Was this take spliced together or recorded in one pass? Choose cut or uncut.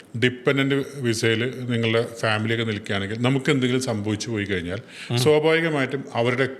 uncut